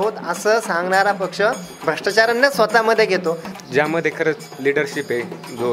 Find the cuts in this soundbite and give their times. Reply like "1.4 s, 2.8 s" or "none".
3.5 s